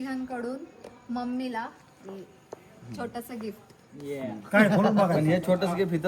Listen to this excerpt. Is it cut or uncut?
uncut